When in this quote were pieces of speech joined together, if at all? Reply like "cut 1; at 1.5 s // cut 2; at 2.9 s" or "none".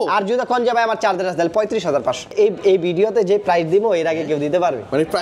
cut 1; at 2.3 s